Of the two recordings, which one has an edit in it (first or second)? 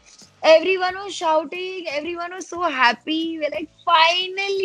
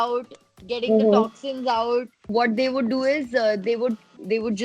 second